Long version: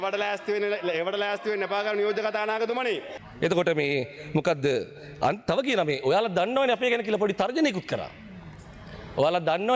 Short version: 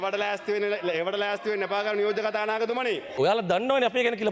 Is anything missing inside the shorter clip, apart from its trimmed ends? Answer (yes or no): yes